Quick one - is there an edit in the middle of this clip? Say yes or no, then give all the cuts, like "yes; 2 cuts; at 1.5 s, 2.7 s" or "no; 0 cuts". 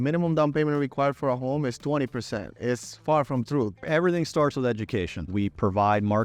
yes; 3 cuts; at 2.5 s, 3.8 s, 5.3 s